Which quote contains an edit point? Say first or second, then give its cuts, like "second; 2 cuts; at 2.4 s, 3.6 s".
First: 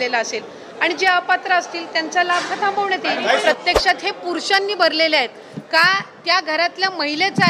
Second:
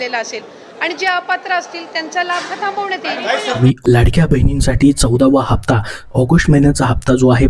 first; 1 cut; at 3.4 s